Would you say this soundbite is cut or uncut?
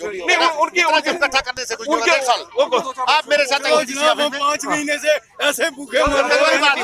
uncut